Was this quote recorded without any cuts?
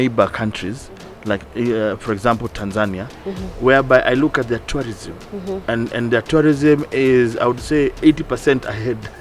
yes; 0 cuts

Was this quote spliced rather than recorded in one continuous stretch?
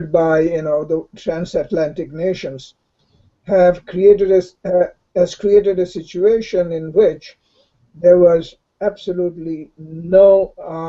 no; 0 cuts

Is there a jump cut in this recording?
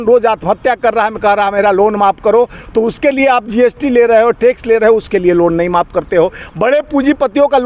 no; 0 cuts

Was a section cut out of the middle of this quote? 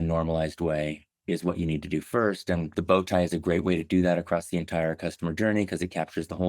yes; 1 cut; at 2.7 s

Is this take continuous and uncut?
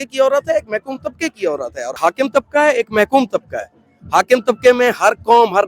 no; 1 cut; at 2.0 s

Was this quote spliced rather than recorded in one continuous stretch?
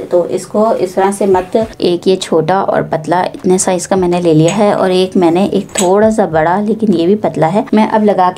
yes; 1 cut; at 1.7 s

